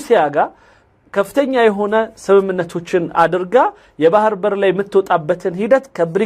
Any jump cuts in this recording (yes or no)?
no